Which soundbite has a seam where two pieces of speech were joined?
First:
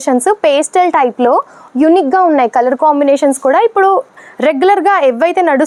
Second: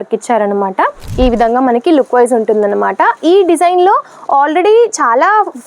second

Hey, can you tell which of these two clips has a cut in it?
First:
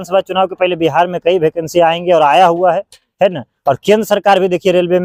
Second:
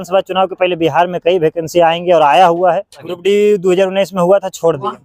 second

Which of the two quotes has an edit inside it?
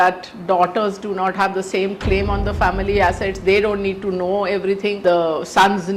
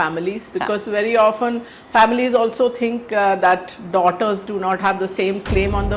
first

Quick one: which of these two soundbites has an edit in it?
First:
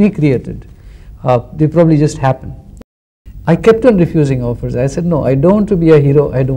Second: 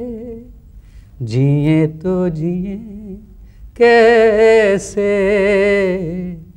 first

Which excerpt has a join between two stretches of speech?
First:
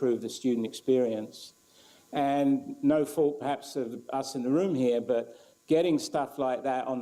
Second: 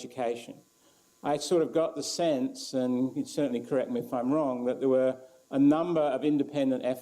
second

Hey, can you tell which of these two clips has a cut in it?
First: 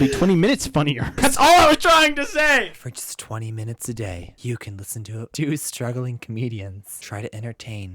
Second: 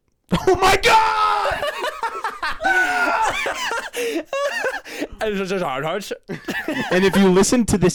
first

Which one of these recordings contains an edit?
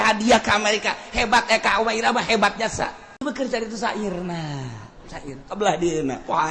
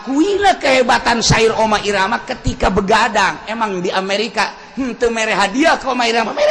first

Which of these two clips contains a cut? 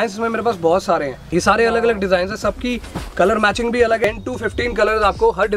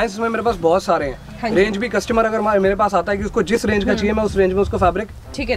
first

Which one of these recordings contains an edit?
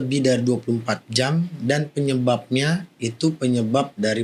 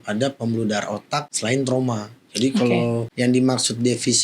second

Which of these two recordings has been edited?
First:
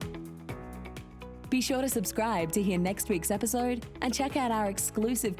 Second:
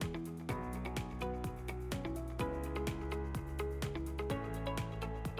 first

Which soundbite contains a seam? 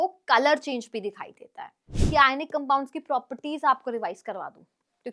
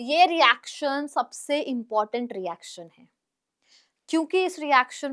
first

